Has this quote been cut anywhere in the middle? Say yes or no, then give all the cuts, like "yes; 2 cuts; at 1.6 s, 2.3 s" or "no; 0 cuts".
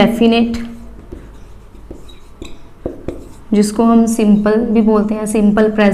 no; 0 cuts